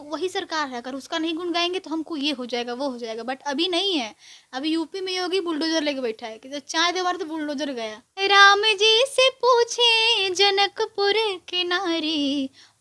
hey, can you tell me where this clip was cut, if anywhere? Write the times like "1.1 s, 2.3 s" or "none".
8.0 s